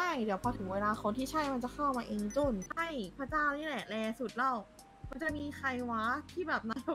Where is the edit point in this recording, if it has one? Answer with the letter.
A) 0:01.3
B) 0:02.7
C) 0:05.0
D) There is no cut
B